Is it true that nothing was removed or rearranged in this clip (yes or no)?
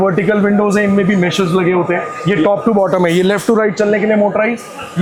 yes